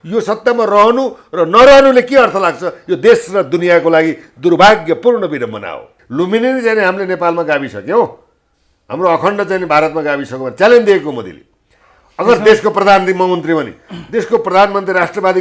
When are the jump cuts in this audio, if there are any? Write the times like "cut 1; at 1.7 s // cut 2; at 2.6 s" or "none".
cut 1; at 6.0 s